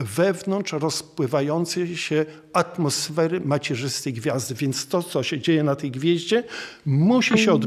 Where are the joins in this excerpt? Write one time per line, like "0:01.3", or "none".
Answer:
none